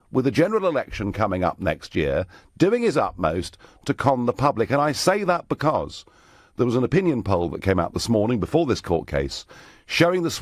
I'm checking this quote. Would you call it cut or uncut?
cut